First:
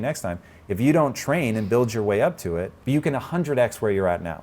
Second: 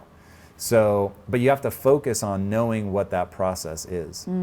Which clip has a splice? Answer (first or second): first